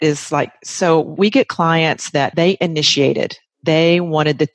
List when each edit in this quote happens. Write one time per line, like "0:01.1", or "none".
0:01.1
0:02.3